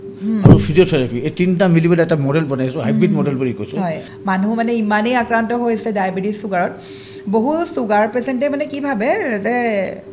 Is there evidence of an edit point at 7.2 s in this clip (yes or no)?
no